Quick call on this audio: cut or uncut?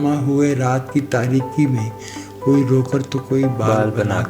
uncut